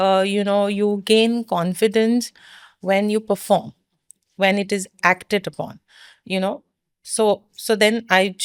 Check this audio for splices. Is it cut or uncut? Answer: uncut